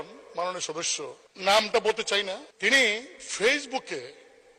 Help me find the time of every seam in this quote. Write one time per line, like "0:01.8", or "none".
0:01.2
0:02.5